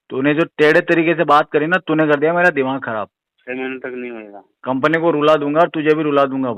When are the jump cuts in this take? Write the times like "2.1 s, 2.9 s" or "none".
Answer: 3.3 s